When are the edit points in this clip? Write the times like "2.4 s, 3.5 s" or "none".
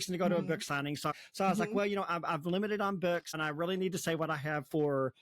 1.1 s, 3.4 s